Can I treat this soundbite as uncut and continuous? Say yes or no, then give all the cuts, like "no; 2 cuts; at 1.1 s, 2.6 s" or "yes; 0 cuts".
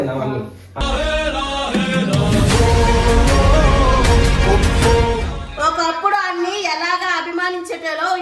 no; 1 cut; at 5.4 s